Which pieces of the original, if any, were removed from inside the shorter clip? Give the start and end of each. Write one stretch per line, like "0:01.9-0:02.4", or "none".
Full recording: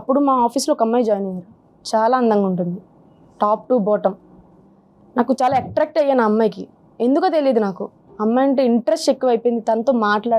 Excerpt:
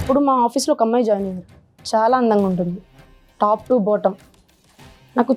none